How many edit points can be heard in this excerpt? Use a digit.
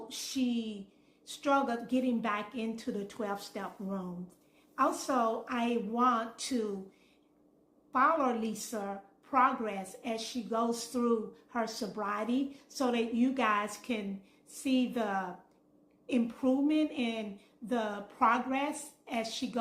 0